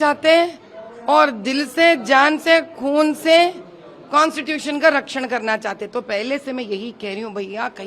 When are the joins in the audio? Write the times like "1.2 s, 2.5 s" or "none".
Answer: none

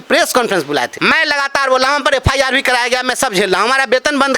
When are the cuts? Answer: 0.9 s

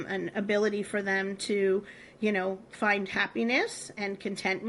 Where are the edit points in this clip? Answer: none

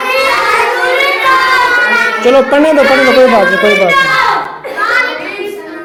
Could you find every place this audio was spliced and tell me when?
none

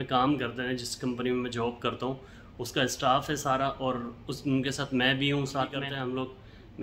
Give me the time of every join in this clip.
5.8 s

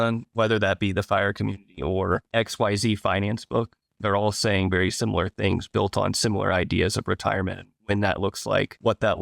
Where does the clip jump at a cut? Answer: 2.3 s

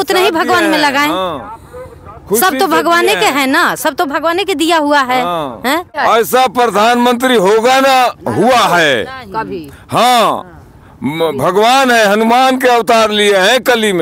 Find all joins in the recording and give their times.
6.0 s

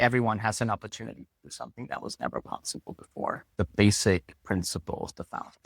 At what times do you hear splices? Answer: 3.4 s

